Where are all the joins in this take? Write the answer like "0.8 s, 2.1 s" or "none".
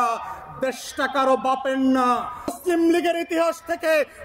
2.6 s